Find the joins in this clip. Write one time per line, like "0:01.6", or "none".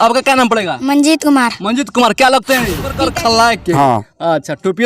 0:03.0